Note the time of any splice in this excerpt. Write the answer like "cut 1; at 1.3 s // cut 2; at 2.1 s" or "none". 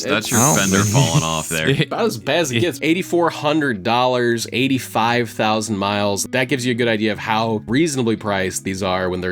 cut 1; at 2.8 s // cut 2; at 6.3 s